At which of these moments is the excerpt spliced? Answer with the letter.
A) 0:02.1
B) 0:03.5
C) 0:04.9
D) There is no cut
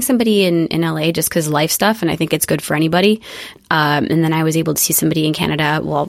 B